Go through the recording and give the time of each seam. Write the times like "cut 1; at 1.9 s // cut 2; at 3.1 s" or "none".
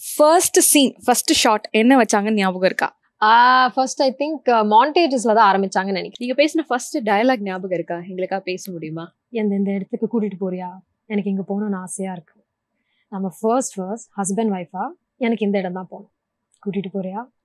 cut 1; at 6.1 s